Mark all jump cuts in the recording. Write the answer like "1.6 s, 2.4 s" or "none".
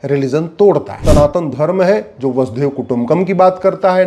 0.9 s